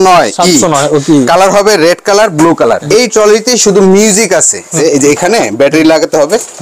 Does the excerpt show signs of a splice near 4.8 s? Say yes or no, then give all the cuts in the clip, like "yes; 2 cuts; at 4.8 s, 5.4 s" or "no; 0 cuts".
yes; 2 cuts; at 2.8 s, 4.8 s